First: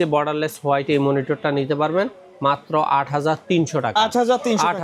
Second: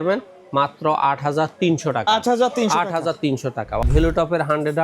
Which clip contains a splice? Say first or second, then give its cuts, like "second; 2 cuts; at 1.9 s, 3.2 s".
second; 1 cut; at 3.9 s